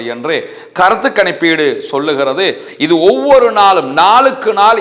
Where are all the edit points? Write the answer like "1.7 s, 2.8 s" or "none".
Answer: none